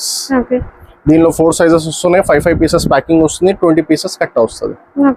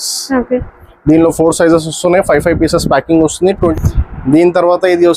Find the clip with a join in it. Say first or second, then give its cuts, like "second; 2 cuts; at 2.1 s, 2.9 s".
second; 1 cut; at 3.7 s